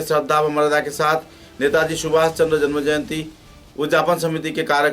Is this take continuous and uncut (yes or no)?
yes